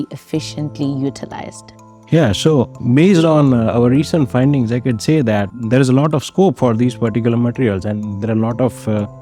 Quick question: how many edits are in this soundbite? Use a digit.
2